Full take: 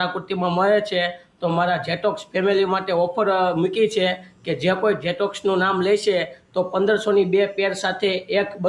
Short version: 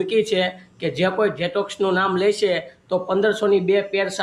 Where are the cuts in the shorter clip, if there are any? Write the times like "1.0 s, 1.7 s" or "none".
none